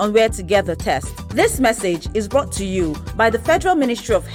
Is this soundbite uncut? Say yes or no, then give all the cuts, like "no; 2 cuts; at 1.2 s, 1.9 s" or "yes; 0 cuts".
yes; 0 cuts